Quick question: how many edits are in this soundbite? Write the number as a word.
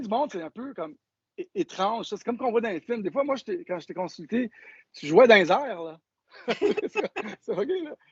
zero